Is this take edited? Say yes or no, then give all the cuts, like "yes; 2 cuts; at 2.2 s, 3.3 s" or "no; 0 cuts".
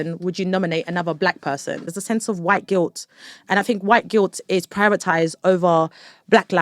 yes; 1 cut; at 1.9 s